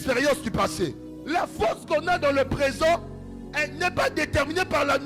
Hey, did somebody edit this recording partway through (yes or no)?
yes